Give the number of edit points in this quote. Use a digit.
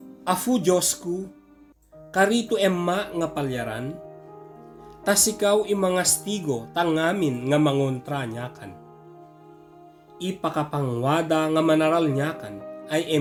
0